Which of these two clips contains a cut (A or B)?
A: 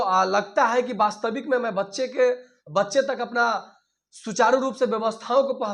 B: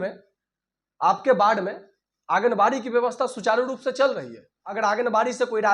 B